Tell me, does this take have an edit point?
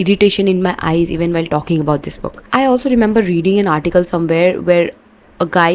yes; 1 cut; at 2.5 s

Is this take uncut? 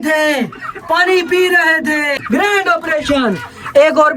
no; 1 cut; at 2.2 s

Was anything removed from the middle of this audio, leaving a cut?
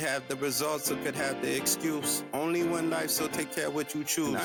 no; 0 cuts

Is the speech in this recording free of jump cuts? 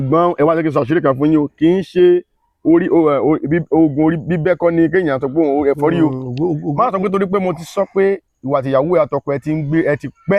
yes; 0 cuts

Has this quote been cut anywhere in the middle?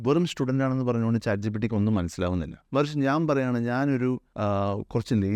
yes; 2 cuts; at 2.5 s, 4.3 s

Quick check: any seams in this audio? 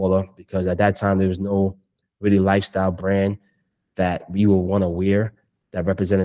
no; 0 cuts

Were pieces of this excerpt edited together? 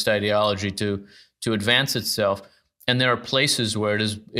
no; 0 cuts

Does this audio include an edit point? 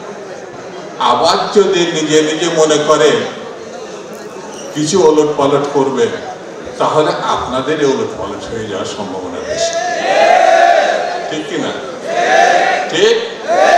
no; 0 cuts

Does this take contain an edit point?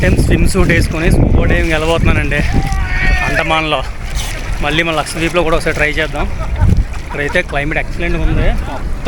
no; 0 cuts

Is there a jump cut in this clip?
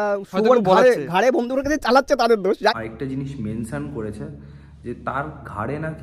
yes; 1 cut; at 2.7 s

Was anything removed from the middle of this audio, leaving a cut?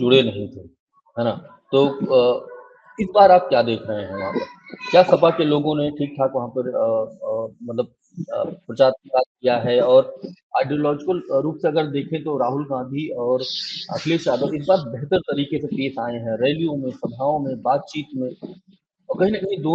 no; 0 cuts

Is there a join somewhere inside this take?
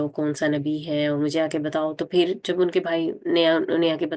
no; 0 cuts

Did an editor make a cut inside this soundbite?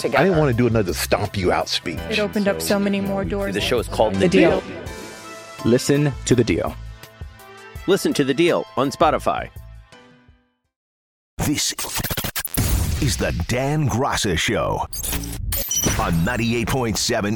yes; 1 cut; at 11.2 s

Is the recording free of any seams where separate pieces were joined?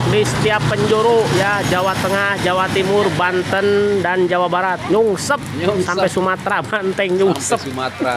yes; 0 cuts

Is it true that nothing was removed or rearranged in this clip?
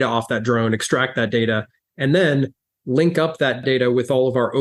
no; 1 cut; at 3.6 s

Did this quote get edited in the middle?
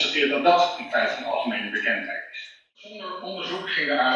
yes; 1 cut; at 2.8 s

